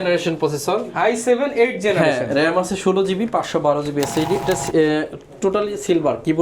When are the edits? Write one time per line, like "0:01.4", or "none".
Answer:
0:04.4